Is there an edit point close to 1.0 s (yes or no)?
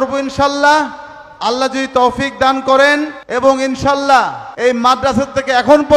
no